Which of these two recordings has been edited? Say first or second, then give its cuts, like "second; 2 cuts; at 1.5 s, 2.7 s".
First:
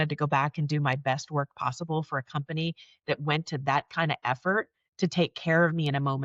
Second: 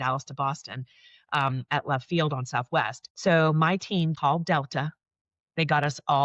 second; 2 cuts; at 3.0 s, 4.1 s